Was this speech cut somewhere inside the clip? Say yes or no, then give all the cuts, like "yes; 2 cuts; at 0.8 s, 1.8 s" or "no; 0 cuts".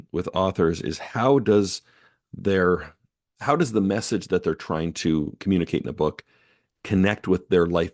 no; 0 cuts